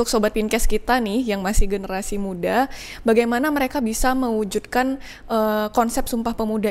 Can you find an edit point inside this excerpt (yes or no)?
no